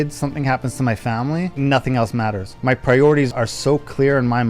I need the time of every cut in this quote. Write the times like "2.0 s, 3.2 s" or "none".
1.5 s, 2.5 s, 3.3 s